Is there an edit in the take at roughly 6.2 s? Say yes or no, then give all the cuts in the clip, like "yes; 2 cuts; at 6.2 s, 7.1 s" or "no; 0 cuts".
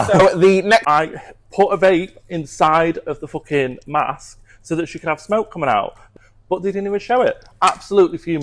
yes; 2 cuts; at 0.8 s, 6.2 s